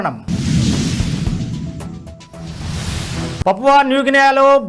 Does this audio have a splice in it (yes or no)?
no